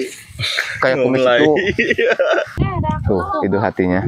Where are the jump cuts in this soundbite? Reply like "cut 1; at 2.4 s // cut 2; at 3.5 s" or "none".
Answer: cut 1; at 2.6 s